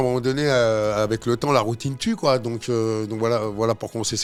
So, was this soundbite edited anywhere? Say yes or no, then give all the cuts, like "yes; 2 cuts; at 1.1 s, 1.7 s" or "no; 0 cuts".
no; 0 cuts